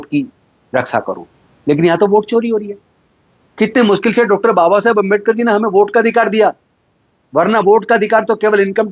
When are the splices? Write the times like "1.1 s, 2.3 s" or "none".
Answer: none